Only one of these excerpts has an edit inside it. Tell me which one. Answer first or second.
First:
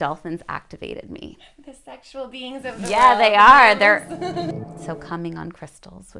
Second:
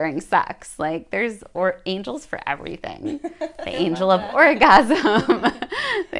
first